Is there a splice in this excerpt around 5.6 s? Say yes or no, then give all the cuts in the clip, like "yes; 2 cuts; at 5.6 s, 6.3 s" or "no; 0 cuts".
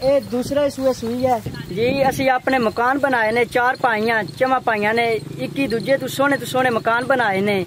no; 1 cut; at 1.6 s